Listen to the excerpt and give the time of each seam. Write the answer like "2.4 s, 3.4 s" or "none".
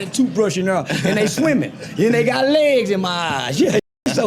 none